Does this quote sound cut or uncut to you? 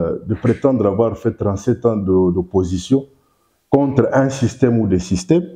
uncut